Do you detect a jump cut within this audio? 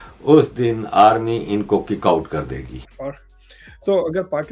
yes; 1 cut; at 2.9 s

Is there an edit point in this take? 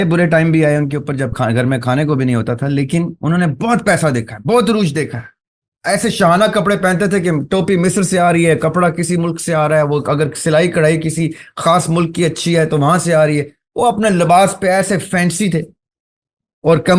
no; 0 cuts

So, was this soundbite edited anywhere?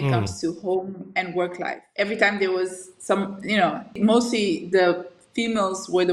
yes; 2 cuts; at 1.8 s, 4.0 s

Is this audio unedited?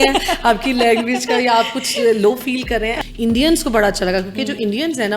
no; 1 cut; at 3.0 s

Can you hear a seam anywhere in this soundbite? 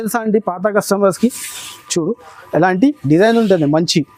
no; 0 cuts

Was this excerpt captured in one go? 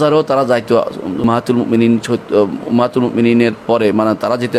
no; 1 cut; at 1.2 s

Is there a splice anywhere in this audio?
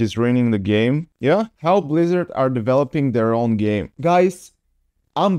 yes; 1 cut; at 1.5 s

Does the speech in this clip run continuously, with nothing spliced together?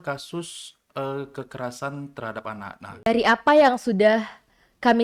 no; 1 cut; at 3.1 s

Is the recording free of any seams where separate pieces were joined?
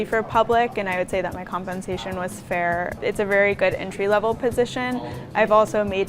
no; 2 cuts; at 2.9 s, 5.2 s

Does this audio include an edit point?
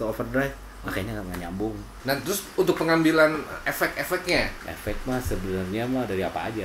yes; 2 cuts; at 1.9 s, 4.6 s

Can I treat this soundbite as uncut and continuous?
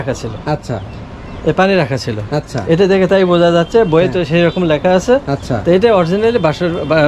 yes; 0 cuts

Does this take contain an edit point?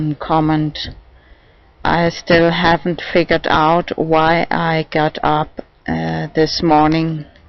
yes; 1 cut; at 6.1 s

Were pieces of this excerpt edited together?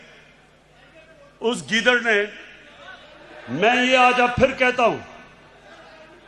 no; 0 cuts

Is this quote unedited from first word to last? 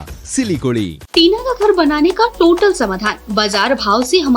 no; 1 cut; at 1.0 s

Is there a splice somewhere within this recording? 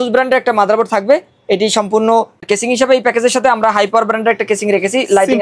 yes; 1 cut; at 2.4 s

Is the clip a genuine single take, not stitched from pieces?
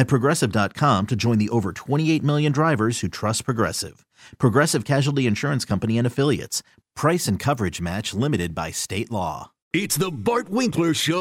no; 1 cut; at 9.5 s

